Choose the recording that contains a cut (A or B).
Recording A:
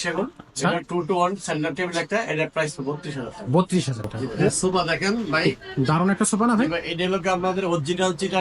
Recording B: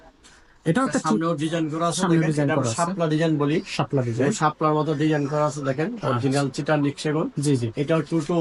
A